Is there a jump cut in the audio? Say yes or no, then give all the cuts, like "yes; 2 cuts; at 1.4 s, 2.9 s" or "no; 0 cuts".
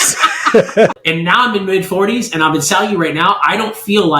yes; 1 cut; at 1.0 s